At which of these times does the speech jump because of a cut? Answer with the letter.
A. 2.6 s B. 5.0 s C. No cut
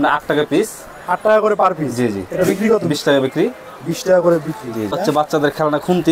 B